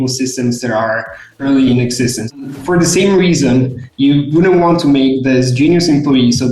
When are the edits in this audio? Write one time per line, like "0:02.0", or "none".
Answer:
0:02.2

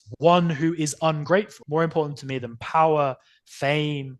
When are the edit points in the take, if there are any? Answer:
0:01.6

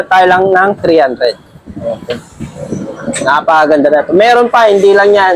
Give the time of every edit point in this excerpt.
none

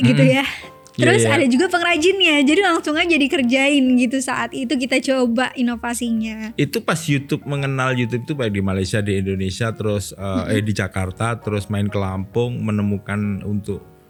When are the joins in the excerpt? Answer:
none

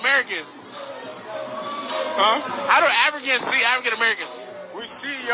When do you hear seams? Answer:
0:04.0

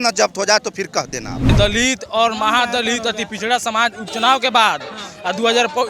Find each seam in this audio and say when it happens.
0:01.5

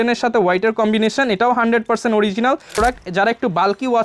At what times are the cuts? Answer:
0:02.8

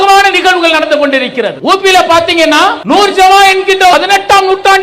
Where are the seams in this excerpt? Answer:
0:01.6
0:02.8
0:03.9

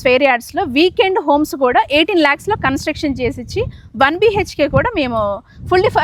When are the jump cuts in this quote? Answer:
none

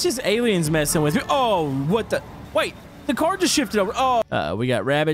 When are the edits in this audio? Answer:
0:04.2

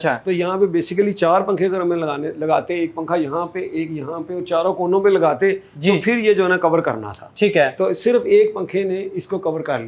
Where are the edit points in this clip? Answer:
none

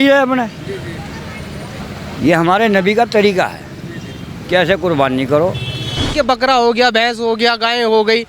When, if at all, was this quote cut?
0:06.1

